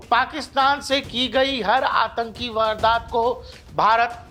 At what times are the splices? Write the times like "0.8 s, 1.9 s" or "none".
none